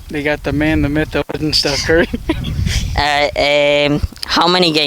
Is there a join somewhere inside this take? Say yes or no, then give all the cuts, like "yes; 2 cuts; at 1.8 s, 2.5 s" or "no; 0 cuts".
no; 0 cuts